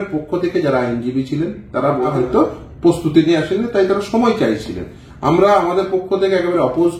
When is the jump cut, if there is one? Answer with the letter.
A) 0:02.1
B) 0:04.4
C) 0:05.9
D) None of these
A